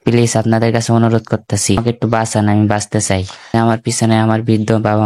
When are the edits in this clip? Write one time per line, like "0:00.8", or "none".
0:01.8
0:03.4